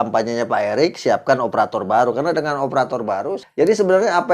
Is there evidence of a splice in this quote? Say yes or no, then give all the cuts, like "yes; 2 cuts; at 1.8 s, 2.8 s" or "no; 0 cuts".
yes; 1 cut; at 3.4 s